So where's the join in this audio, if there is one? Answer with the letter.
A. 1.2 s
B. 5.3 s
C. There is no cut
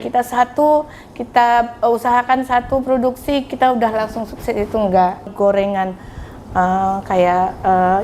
B